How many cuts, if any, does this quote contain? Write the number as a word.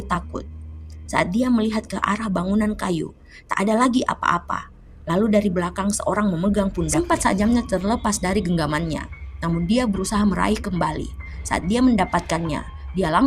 one